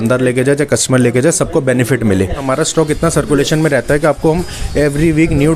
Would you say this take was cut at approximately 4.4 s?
no; 1 cut; at 2.4 s

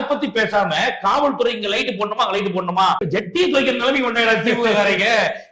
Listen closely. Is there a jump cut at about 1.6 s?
no; 1 cut; at 3.0 s

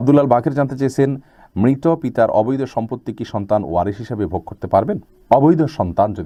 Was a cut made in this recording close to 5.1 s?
no; 0 cuts

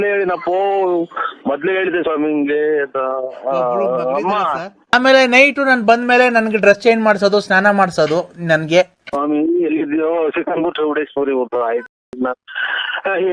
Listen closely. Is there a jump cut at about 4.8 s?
yes; 1 cut; at 4.8 s

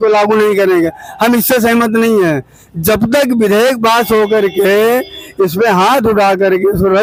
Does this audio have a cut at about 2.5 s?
no; 0 cuts

